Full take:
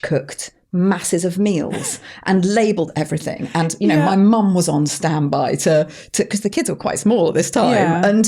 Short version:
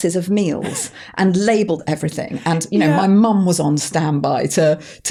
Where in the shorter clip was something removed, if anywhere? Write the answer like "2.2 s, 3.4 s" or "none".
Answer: none